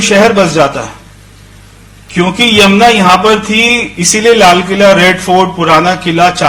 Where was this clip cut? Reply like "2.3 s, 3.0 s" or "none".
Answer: none